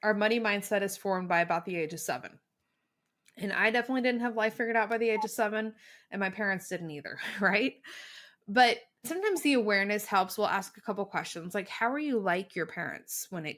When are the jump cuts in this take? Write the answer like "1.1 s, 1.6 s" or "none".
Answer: none